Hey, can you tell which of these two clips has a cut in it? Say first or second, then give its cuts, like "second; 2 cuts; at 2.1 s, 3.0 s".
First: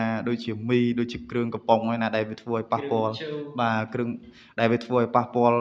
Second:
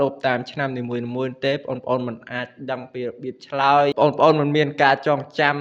second; 1 cut; at 3.9 s